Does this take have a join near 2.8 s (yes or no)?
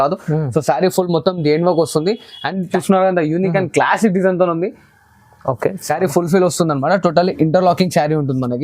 yes